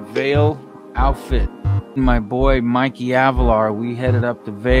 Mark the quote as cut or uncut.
cut